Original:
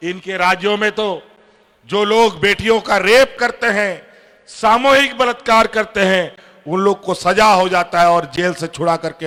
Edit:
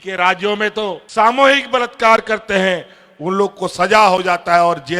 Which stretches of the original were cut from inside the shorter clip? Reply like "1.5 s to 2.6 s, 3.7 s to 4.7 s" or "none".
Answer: 1.2 s to 4.5 s